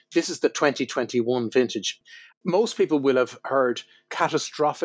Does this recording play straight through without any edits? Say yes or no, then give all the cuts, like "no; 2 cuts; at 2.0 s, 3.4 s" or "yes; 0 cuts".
no; 1 cut; at 1.9 s